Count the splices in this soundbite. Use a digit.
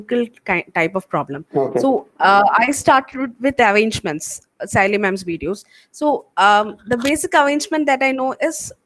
0